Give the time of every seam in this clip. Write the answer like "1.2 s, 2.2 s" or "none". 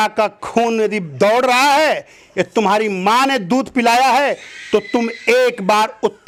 none